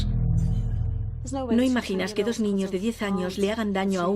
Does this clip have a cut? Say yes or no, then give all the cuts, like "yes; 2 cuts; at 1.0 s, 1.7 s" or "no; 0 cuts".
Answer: no; 0 cuts